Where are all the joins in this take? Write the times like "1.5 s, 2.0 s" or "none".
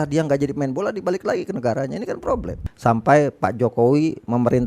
2.6 s